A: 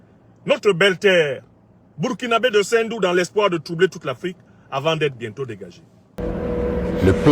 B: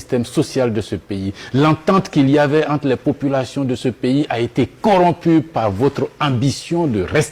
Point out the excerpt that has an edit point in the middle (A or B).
A